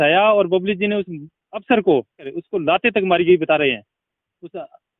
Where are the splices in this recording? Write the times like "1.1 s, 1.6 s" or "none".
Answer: 2.4 s